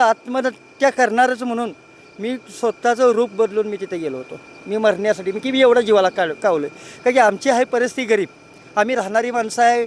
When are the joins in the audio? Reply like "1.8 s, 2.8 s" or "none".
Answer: none